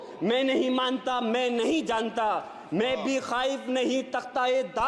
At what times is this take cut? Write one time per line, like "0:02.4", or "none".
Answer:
none